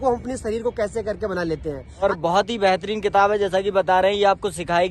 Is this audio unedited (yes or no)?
no